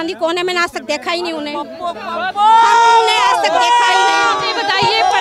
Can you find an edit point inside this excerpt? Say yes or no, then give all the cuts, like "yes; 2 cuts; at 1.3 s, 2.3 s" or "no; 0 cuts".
no; 0 cuts